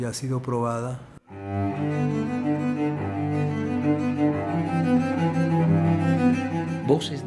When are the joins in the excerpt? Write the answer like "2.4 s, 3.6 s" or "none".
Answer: 1.3 s